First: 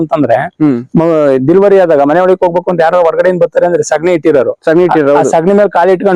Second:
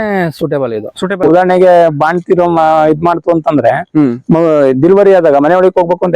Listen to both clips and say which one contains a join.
second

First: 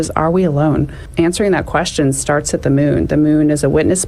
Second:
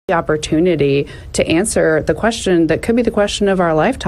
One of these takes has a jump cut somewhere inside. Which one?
first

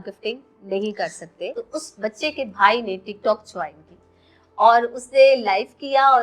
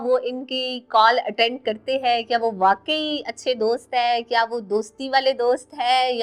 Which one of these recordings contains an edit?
first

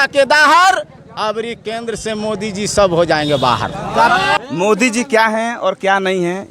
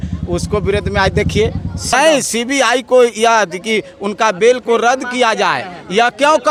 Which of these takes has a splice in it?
first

